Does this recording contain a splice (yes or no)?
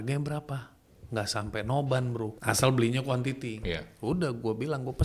yes